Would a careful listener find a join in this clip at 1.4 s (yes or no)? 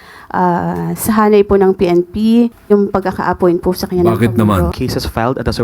no